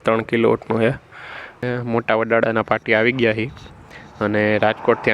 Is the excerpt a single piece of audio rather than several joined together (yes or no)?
no